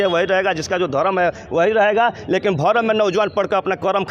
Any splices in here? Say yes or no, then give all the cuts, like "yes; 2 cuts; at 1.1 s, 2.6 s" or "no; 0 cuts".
no; 0 cuts